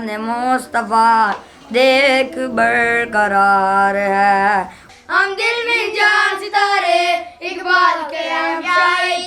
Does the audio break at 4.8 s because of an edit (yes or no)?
yes